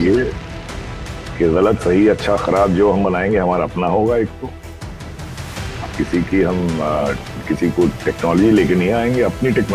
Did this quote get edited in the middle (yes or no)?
no